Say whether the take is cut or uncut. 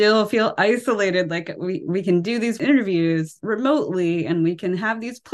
cut